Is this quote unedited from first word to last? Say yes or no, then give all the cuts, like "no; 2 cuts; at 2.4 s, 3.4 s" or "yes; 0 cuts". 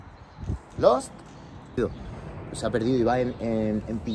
no; 1 cut; at 1.8 s